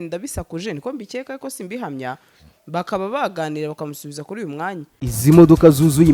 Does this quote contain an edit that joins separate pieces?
yes; 1 cut; at 4.9 s

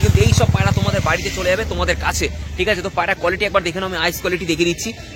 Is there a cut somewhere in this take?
no; 0 cuts

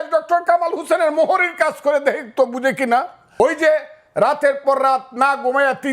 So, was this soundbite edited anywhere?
yes; 1 cut; at 3.2 s

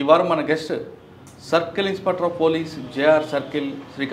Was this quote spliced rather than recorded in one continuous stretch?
no; 0 cuts

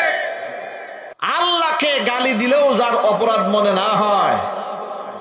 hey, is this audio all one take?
no; 1 cut; at 1.1 s

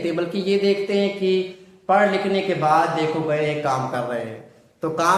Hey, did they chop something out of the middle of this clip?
no; 0 cuts

